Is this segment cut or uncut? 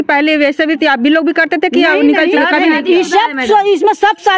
uncut